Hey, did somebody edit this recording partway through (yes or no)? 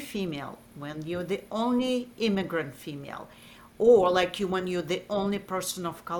no